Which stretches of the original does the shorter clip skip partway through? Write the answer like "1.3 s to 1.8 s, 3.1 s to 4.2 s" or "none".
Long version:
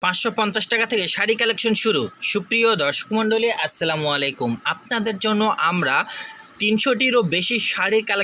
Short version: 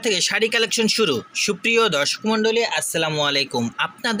none

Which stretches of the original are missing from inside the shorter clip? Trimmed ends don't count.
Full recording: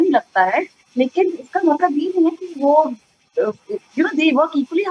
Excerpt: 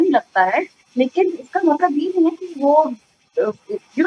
none

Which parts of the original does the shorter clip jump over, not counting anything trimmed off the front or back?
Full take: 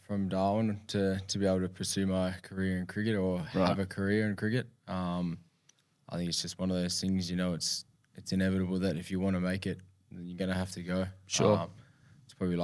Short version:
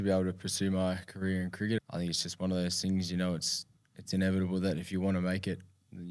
3.1 s to 6.0 s

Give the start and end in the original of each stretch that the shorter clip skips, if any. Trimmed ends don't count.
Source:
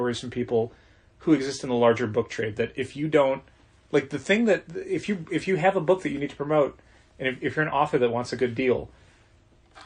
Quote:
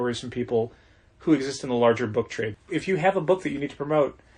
2.6 s to 5.2 s

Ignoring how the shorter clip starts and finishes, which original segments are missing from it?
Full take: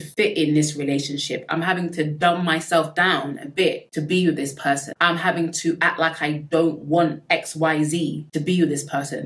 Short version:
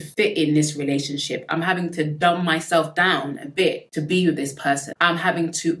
none

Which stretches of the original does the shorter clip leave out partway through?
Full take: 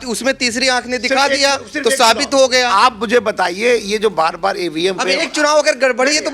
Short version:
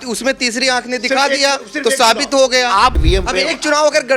3.0 s to 4.7 s

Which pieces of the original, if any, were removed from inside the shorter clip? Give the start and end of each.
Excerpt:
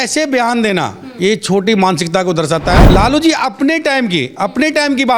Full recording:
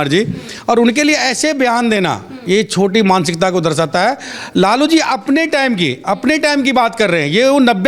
4.1 s to 4.5 s

